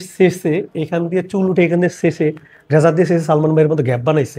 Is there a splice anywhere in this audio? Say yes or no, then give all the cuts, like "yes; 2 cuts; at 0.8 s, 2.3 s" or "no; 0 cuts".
no; 0 cuts